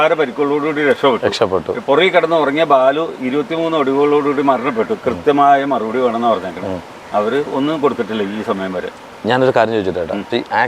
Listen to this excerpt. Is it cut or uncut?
uncut